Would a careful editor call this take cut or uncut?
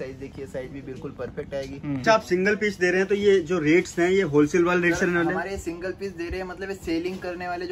cut